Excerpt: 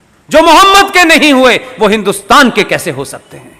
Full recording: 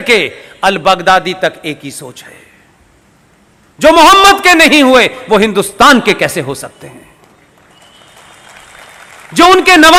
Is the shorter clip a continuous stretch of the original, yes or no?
yes